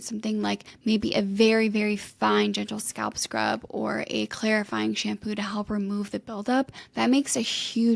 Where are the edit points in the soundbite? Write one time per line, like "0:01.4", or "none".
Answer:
none